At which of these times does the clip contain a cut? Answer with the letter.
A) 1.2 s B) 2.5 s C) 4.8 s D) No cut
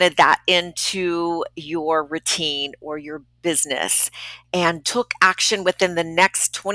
C